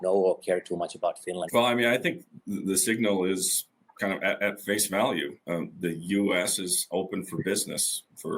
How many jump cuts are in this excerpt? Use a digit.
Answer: 1